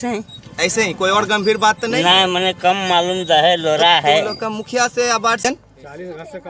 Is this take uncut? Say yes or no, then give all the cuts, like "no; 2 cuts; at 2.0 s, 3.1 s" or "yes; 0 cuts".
no; 1 cut; at 5.4 s